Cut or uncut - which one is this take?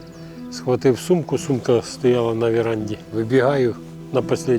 cut